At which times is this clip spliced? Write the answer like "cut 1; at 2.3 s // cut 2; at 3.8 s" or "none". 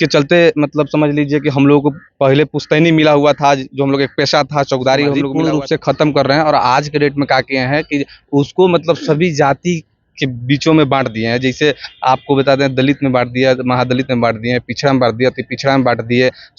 cut 1; at 5.3 s